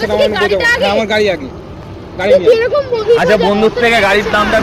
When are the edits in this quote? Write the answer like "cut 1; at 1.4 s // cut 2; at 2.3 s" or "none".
cut 1; at 3.0 s